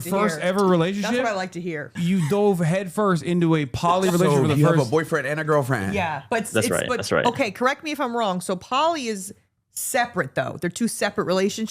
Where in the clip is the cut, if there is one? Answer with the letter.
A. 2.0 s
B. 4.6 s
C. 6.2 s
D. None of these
A